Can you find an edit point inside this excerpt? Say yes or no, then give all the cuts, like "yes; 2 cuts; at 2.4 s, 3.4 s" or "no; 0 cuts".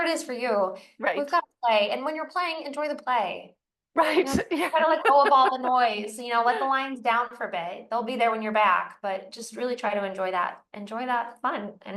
no; 0 cuts